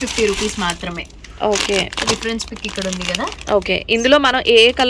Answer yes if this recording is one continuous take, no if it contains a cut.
yes